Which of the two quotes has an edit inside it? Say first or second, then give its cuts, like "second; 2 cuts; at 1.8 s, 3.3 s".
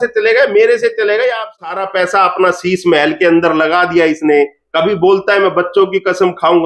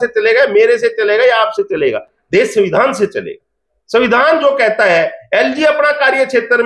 first; 1 cut; at 1.7 s